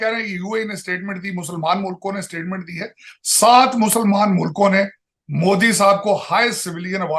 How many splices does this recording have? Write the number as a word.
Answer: zero